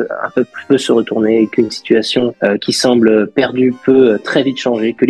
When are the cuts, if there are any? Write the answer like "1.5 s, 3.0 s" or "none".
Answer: none